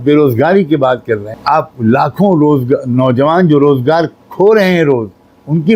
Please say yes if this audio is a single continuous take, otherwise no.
no